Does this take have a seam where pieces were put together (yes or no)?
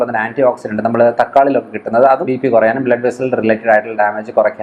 yes